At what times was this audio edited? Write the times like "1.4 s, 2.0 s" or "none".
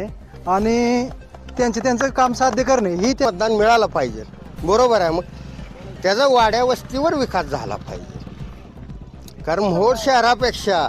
3.3 s